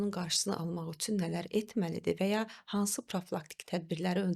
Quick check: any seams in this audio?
no; 0 cuts

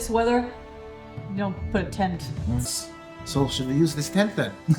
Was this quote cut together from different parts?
yes; 1 cut; at 2.7 s

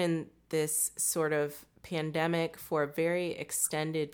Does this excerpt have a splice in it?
no; 0 cuts

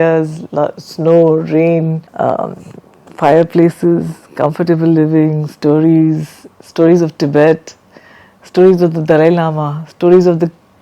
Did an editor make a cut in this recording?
yes; 1 cut; at 2.0 s

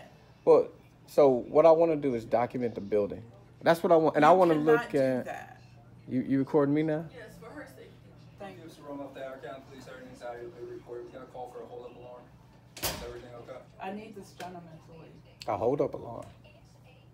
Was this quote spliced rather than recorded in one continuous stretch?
yes; 1 cut; at 8.7 s

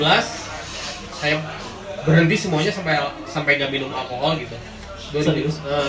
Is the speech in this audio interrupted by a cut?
no; 0 cuts

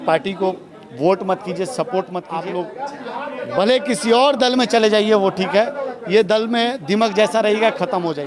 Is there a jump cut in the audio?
yes; 1 cut; at 2.3 s

